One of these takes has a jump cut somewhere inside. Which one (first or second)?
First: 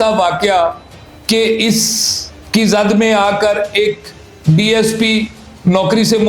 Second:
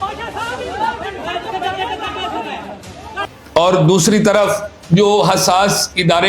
second